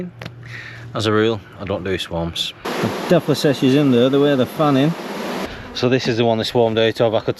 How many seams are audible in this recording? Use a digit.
2